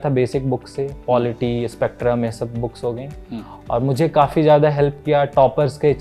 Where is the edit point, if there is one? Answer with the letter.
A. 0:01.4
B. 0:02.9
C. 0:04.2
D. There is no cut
D